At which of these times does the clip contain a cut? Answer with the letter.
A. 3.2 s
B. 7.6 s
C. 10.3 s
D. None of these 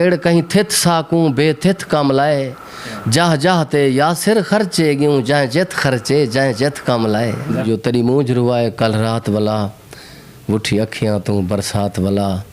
B